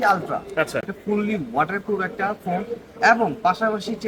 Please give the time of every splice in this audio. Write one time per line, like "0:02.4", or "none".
0:00.9